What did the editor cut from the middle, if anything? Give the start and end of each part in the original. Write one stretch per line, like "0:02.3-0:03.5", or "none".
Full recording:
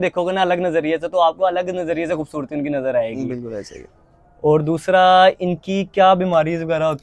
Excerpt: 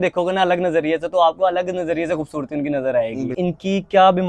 0:03.4-0:05.4